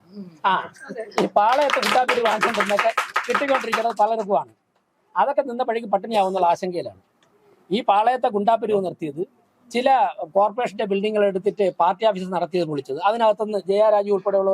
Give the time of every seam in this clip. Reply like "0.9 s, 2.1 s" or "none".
none